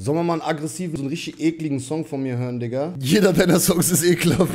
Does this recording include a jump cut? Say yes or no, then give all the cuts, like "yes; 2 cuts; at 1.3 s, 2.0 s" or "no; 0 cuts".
yes; 2 cuts; at 0.9 s, 3.0 s